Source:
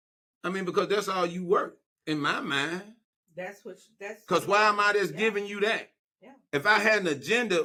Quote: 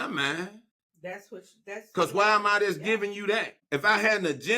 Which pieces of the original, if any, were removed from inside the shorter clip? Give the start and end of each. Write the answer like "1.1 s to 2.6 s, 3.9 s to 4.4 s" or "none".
5.9 s to 6.4 s